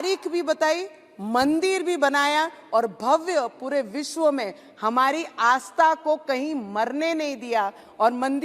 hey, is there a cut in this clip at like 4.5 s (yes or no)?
no